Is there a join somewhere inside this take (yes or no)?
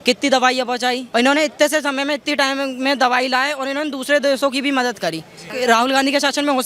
yes